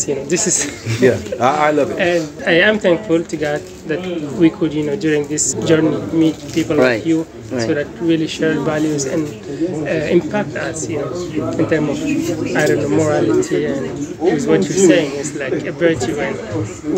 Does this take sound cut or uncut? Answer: cut